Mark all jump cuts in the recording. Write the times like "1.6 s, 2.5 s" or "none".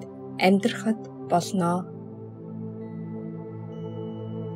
1.9 s